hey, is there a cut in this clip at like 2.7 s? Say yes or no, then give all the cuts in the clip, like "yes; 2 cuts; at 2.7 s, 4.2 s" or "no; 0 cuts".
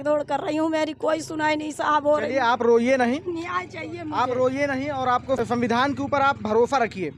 no; 1 cut; at 5.4 s